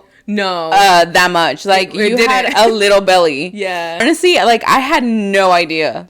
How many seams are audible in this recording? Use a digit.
1